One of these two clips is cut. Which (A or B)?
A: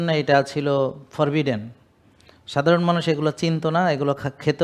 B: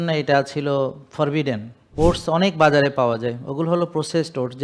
B